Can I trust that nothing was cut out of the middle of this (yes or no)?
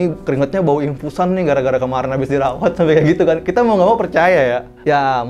yes